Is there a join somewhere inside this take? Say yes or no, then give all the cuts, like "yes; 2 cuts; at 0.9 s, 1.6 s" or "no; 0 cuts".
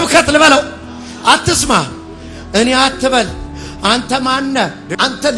no; 0 cuts